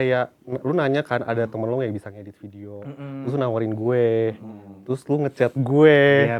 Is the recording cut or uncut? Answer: uncut